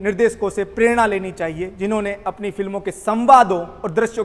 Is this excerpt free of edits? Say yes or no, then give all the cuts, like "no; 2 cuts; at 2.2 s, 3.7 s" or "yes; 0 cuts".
yes; 0 cuts